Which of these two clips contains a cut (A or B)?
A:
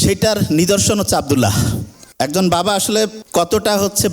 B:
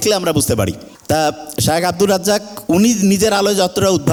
A